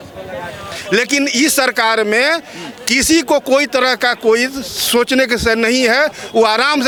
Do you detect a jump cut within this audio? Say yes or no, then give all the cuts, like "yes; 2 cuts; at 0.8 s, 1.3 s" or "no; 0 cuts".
no; 0 cuts